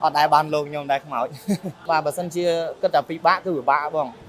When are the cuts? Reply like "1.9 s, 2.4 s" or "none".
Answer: 1.7 s